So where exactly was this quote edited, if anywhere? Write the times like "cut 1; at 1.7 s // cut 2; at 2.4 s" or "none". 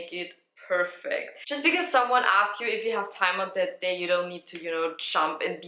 cut 1; at 1.4 s